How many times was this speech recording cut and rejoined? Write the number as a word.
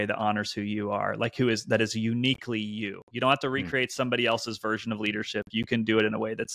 zero